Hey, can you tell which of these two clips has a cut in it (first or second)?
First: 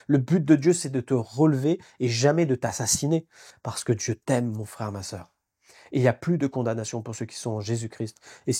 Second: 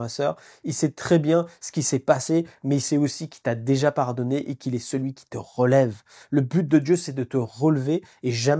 first